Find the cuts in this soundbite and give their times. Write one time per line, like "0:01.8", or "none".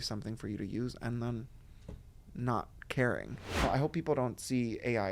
0:03.6